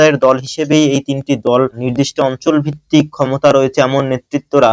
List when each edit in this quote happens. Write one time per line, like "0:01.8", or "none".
0:01.8